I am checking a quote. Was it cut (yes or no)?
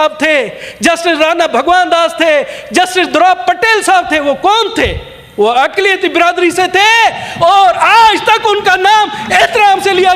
no